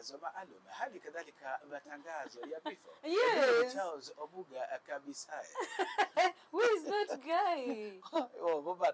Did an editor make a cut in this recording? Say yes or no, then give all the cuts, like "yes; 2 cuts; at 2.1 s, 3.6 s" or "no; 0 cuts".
no; 0 cuts